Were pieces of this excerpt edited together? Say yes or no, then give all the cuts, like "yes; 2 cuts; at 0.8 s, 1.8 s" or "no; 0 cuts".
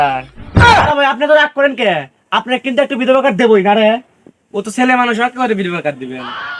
no; 0 cuts